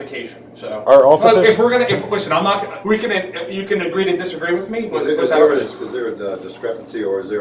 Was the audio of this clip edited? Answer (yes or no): yes